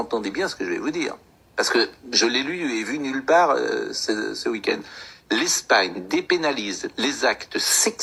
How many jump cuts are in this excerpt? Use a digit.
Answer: 0